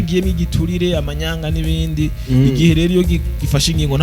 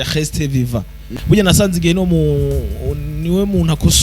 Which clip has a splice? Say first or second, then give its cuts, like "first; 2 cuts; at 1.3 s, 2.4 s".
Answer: second; 1 cut; at 1.0 s